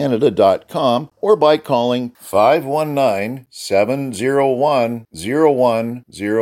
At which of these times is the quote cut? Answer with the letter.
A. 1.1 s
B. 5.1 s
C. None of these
A